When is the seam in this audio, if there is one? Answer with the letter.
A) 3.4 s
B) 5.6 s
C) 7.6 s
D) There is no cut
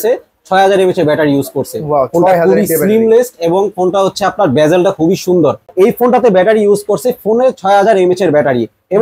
B